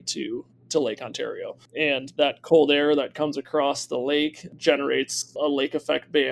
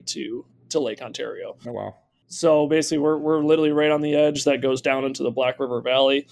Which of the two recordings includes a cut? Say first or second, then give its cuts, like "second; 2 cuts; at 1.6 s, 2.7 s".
first; 2 cuts; at 1.7 s, 5.3 s